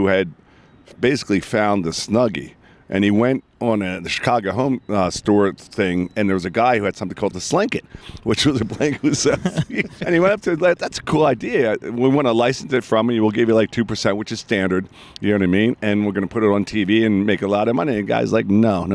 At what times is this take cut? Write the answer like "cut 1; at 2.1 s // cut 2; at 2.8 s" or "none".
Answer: cut 1; at 10.0 s